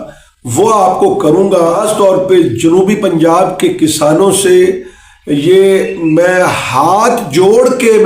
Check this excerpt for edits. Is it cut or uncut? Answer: cut